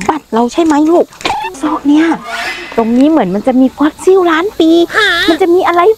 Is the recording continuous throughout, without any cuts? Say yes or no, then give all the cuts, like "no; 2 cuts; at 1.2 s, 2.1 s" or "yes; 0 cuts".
no; 2 cuts; at 1.5 s, 2.6 s